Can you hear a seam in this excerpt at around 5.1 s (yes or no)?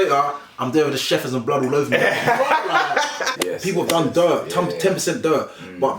no